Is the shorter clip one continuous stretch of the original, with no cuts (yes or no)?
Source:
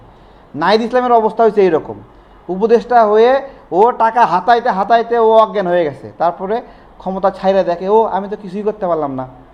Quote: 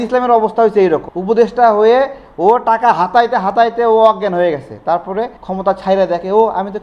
no